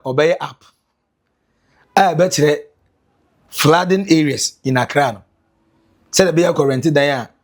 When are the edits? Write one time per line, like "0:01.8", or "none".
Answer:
none